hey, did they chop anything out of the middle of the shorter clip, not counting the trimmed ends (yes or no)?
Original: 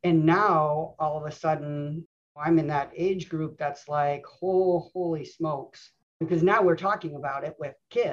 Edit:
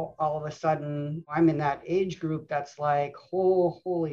yes